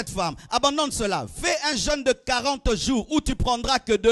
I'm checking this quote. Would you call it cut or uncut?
uncut